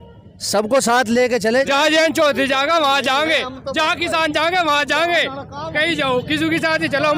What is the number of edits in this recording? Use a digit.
1